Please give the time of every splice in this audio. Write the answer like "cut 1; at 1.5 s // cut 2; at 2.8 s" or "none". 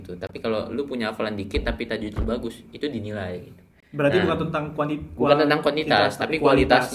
none

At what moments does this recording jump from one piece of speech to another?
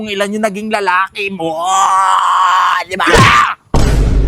none

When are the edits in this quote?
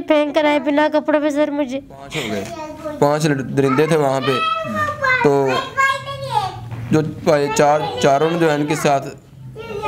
cut 1; at 2.3 s

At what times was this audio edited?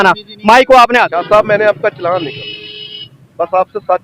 cut 1; at 1.2 s

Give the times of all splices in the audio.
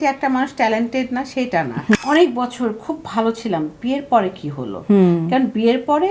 cut 1; at 1.9 s

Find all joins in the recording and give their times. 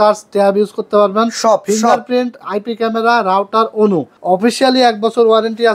cut 1; at 4.1 s

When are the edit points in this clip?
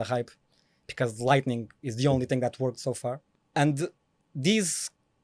cut 1; at 3.3 s

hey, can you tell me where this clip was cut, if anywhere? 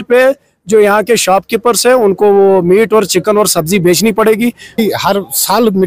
cut 1; at 4.8 s

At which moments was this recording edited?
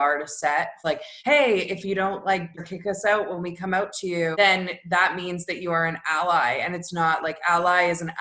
cut 1; at 0.9 s // cut 2; at 2.6 s // cut 3; at 4.3 s

